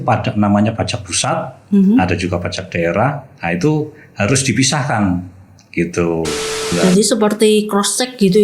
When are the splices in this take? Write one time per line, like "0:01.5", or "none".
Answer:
0:06.7